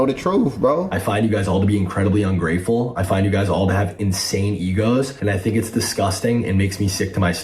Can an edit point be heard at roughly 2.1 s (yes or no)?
no